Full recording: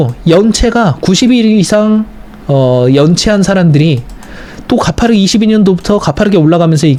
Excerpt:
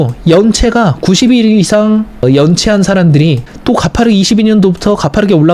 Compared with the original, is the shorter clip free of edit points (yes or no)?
no